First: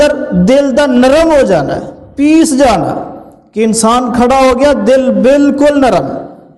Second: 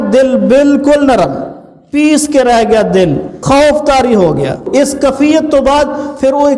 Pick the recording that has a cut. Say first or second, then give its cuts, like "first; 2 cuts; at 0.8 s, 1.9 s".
second; 2 cuts; at 3.4 s, 4.6 s